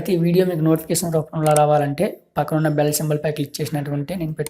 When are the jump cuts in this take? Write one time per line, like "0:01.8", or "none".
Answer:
none